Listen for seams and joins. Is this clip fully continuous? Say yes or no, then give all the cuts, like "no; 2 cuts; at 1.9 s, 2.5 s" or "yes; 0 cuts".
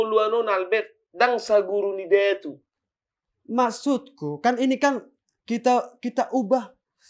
yes; 0 cuts